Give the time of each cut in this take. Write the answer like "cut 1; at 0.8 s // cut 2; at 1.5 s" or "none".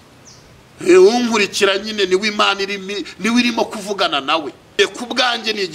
cut 1; at 4.8 s